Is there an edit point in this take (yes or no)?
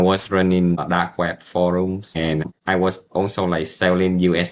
yes